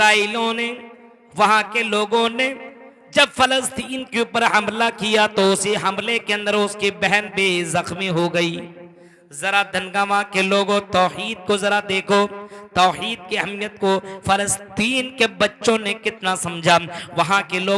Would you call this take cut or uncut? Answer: uncut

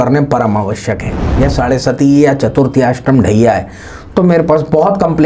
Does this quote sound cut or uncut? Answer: cut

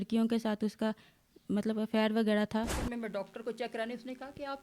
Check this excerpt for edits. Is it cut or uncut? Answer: cut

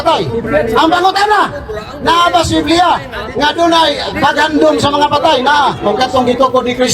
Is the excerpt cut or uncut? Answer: cut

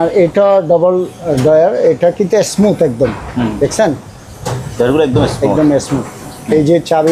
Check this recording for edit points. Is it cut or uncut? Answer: uncut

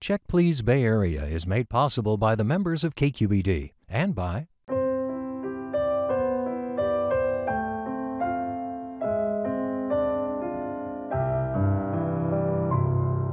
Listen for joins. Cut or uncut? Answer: cut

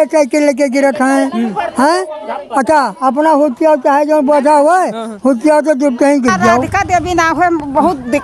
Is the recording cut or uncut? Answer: cut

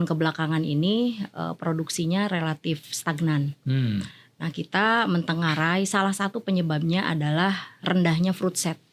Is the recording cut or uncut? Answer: uncut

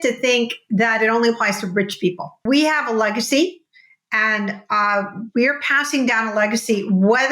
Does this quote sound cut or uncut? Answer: cut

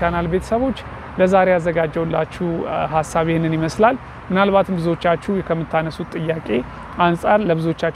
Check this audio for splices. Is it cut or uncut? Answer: uncut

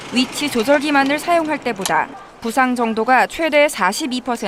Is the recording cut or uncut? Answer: uncut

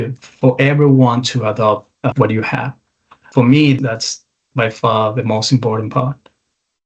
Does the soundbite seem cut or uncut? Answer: cut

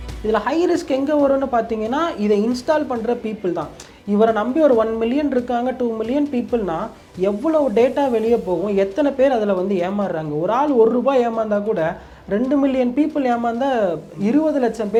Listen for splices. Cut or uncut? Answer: uncut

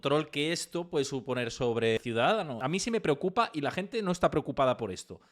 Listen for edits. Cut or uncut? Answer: uncut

